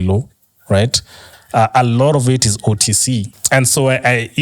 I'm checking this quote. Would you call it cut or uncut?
cut